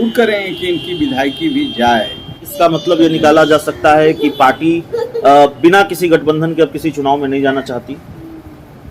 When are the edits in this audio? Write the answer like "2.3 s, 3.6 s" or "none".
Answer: 2.5 s